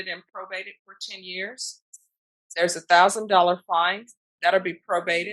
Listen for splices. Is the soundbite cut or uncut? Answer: uncut